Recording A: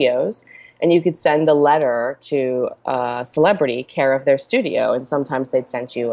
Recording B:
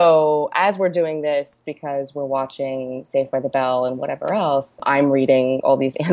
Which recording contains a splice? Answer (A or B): B